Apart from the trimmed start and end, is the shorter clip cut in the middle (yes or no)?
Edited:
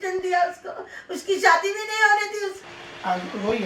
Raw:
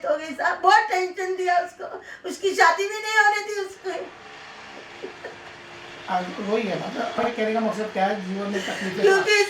yes